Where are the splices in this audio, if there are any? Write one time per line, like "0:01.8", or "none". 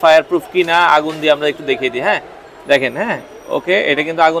none